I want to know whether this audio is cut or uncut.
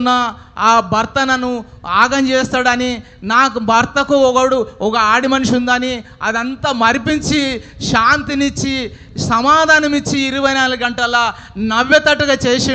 uncut